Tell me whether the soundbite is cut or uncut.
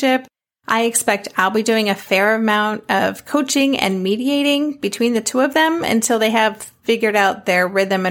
uncut